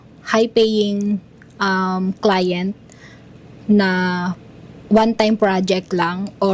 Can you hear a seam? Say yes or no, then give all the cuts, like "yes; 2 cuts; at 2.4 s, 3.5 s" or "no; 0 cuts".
no; 0 cuts